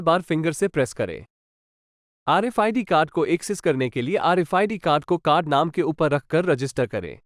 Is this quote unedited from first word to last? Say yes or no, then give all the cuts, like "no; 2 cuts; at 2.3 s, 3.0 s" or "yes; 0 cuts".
yes; 0 cuts